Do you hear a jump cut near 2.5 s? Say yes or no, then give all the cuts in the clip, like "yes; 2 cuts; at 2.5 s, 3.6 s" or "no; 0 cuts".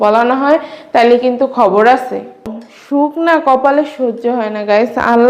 yes; 1 cut; at 2.5 s